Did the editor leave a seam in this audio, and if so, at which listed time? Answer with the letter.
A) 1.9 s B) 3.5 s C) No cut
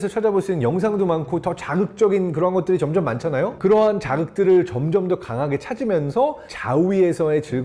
B